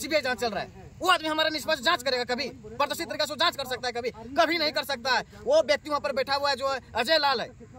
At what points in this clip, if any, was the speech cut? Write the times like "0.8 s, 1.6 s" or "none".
none